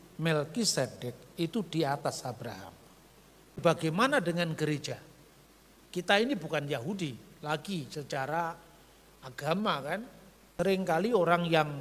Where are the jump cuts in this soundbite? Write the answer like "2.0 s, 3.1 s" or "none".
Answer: 3.6 s, 10.5 s